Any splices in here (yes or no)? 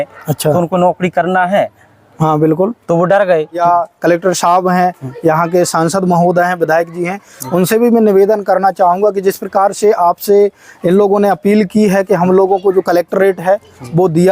yes